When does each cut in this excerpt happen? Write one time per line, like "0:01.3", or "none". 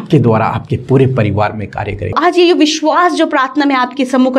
0:02.2